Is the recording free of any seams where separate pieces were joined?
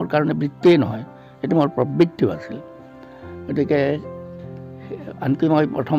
yes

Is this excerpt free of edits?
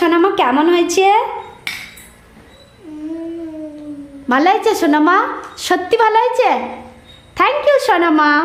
yes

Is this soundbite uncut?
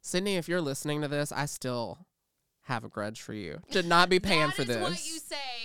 no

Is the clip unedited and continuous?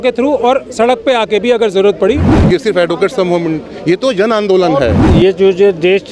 no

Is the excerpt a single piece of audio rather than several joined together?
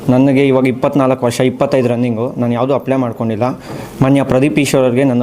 no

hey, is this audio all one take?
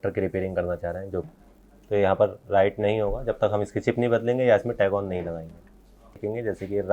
no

